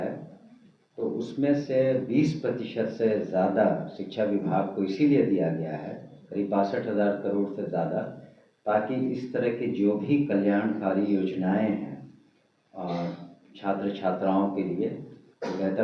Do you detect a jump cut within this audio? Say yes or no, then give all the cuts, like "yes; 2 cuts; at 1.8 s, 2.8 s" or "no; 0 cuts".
no; 0 cuts